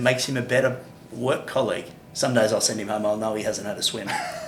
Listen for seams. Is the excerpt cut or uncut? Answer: uncut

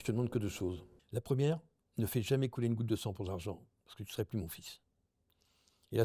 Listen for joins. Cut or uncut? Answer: cut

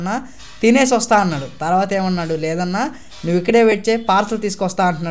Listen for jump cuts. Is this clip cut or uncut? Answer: uncut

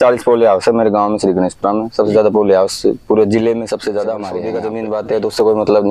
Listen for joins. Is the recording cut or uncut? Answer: cut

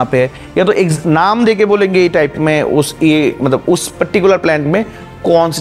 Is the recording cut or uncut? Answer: uncut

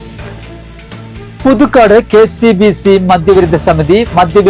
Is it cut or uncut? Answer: cut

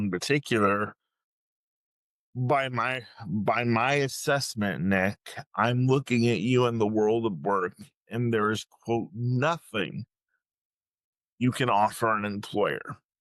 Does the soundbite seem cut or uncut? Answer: uncut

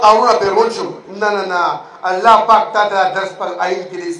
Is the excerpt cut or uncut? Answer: uncut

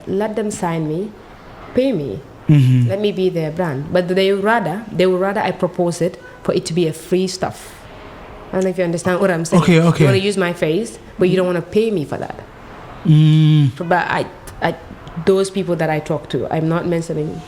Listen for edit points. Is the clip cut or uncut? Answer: uncut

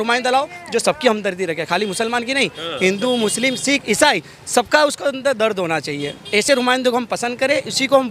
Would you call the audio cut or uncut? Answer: uncut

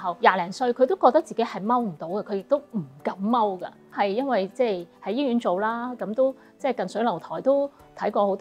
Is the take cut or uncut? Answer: uncut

